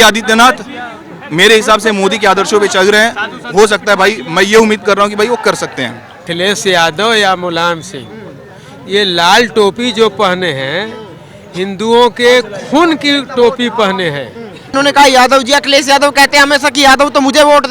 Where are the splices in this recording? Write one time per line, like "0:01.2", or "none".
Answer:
0:06.3
0:14.7